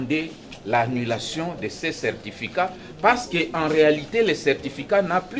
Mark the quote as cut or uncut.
uncut